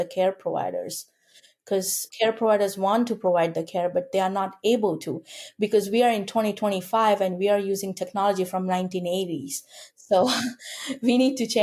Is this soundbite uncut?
yes; 0 cuts

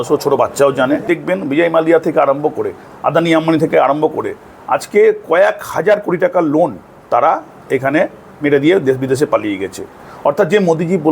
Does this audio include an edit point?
yes; 1 cut; at 1.0 s

